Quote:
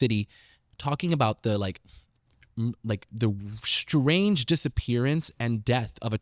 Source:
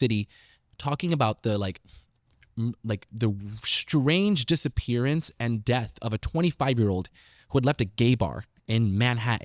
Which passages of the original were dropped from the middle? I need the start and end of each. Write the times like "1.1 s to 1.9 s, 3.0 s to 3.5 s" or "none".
none

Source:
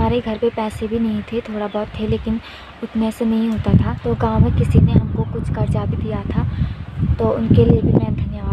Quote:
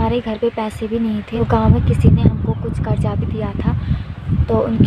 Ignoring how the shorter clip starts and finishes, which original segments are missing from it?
1.3 s to 4.0 s

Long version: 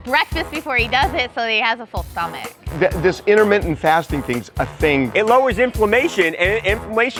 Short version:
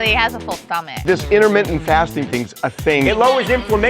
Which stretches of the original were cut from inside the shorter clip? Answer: 2.5 s to 3.0 s, 5.0 s to 5.2 s

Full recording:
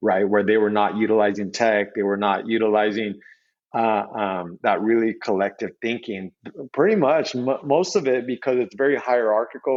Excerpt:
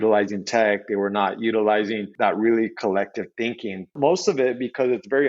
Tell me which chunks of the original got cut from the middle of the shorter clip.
3.1 s to 4.5 s, 6.4 s to 7.6 s

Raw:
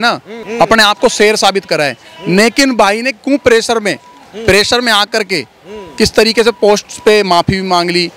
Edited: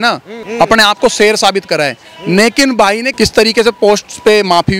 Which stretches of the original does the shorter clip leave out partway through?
3.1 s to 5.9 s

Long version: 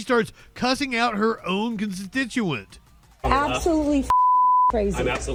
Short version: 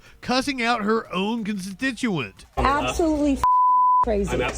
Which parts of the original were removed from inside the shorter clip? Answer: 2.7 s to 3.0 s

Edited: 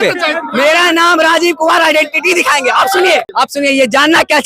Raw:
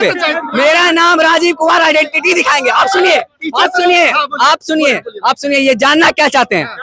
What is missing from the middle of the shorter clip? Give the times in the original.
3.3 s to 5.2 s

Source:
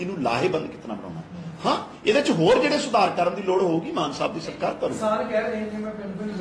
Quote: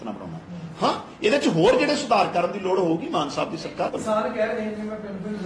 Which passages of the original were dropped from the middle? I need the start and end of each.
4.8 s to 4.9 s

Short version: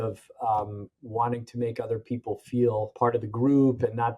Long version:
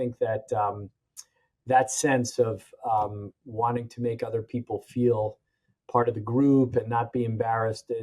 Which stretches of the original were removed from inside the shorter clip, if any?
5.3 s to 5.8 s

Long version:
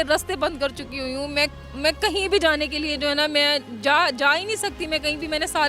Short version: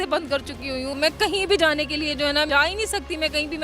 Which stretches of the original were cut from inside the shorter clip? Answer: 1.2 s to 1.7 s, 3.3 s to 4.2 s

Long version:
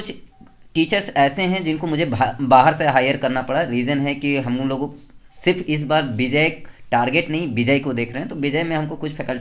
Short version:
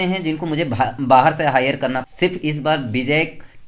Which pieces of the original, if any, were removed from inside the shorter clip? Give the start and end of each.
3.4 s to 5.3 s

